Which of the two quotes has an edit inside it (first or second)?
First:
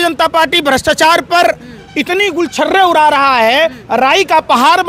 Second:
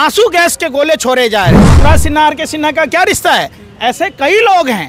second